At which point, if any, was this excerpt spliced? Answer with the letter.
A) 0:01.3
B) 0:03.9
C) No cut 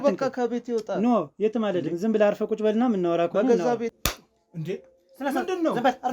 B